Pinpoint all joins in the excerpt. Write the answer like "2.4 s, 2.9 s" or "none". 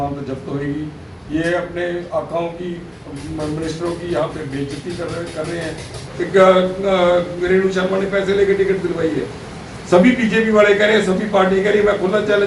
6.0 s